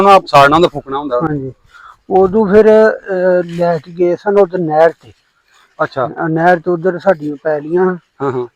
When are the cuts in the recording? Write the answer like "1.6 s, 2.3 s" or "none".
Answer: none